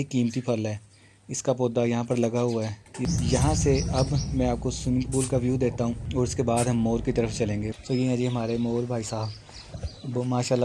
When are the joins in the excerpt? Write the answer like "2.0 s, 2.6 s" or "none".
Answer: 3.0 s, 6.0 s, 7.7 s